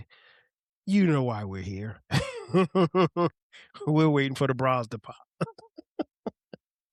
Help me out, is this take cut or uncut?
uncut